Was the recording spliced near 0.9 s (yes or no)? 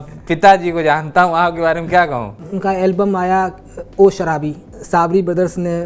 no